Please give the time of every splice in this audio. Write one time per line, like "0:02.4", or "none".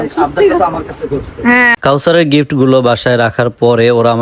0:01.8